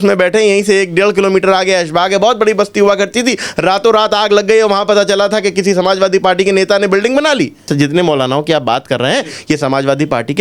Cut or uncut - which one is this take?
cut